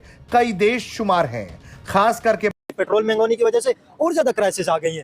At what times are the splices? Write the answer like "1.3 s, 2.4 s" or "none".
2.5 s